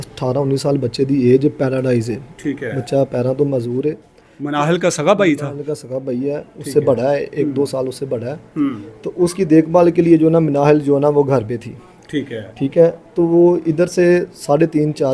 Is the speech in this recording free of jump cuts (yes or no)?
yes